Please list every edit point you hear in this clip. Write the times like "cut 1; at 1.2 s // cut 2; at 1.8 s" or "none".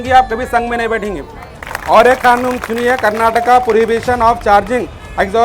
cut 1; at 1.6 s

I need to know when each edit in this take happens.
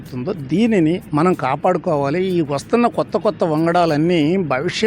cut 1; at 1.0 s

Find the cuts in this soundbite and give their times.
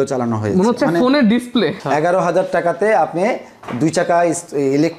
cut 1; at 1.8 s

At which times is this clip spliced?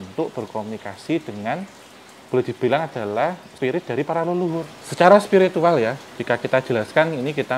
cut 1; at 3.5 s // cut 2; at 4.8 s

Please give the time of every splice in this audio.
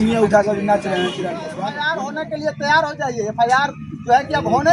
cut 1; at 1.7 s

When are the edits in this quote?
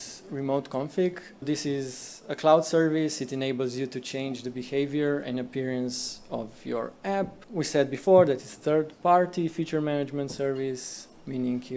cut 1; at 1.4 s // cut 2; at 7.4 s

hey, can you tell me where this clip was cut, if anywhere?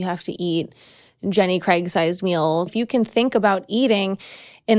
cut 1; at 2.7 s

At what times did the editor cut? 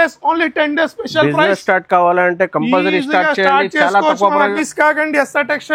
cut 1; at 4.6 s

